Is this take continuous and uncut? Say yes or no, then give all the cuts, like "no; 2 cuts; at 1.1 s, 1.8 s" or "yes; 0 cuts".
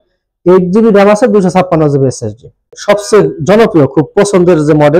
no; 1 cut; at 2.7 s